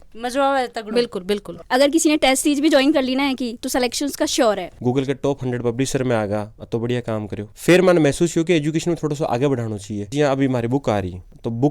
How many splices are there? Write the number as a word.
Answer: four